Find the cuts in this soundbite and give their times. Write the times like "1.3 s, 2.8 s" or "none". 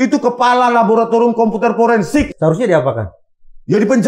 2.3 s